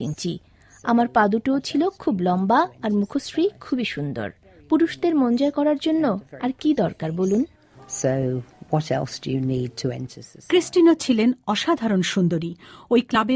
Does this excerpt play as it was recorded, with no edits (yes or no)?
no